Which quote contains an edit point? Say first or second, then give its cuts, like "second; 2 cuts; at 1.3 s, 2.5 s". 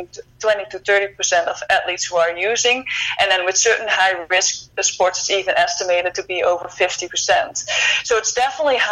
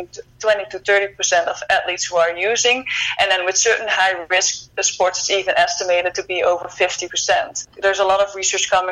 second; 1 cut; at 7.6 s